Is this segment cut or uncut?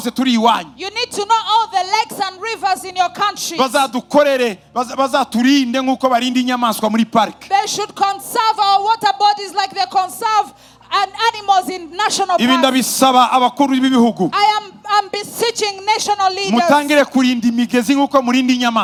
uncut